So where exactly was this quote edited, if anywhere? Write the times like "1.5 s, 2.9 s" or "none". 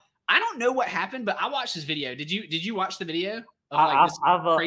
none